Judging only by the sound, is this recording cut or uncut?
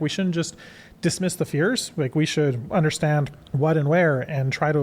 cut